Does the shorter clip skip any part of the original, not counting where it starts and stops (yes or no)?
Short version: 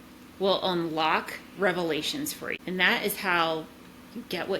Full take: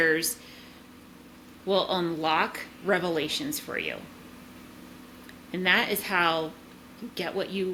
yes